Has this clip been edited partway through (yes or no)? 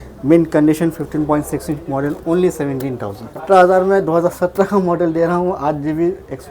yes